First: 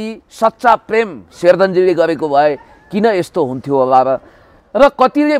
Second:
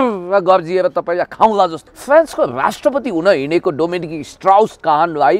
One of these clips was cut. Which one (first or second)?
second